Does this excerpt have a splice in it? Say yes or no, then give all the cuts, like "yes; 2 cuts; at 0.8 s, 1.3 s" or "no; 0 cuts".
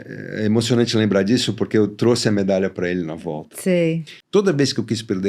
yes; 1 cut; at 4.1 s